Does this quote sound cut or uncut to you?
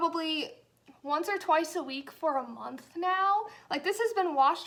uncut